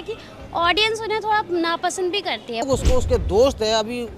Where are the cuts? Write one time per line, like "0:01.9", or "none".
0:02.7